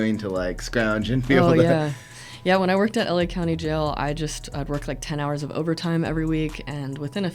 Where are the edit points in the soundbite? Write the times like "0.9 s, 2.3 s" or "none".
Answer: none